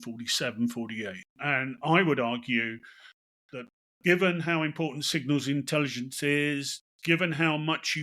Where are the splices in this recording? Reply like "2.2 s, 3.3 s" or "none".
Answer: 1.4 s